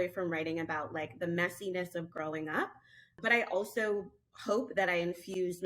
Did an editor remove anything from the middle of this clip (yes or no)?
yes